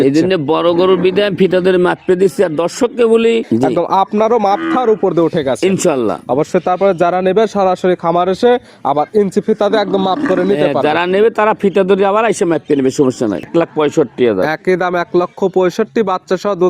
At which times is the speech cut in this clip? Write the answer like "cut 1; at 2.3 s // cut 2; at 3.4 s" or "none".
cut 1; at 3.4 s // cut 2; at 13.5 s